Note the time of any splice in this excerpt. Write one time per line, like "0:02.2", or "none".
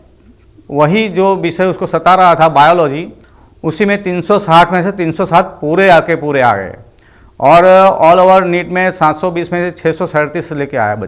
none